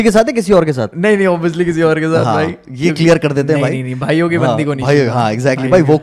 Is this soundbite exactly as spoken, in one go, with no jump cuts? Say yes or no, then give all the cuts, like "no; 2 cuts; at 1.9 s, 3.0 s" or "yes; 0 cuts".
yes; 0 cuts